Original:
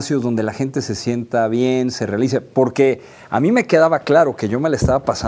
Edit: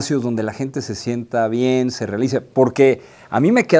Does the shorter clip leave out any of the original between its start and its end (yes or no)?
no